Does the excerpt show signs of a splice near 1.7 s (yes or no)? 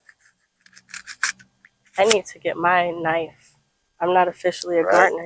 no